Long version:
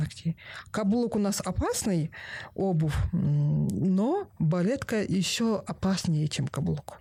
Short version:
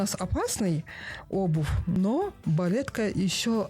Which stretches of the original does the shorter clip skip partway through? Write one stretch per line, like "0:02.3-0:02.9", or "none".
0:03.2-0:03.9